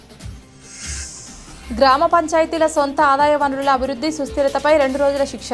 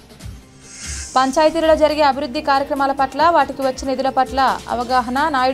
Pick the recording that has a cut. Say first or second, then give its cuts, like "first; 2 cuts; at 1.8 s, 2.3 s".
first; 1 cut; at 0.9 s